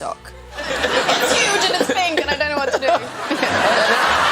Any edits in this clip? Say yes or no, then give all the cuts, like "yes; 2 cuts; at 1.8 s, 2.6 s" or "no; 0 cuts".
no; 0 cuts